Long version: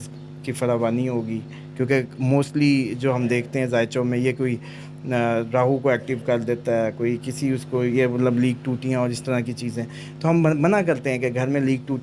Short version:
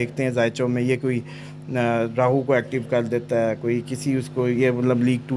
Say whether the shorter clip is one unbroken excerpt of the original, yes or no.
yes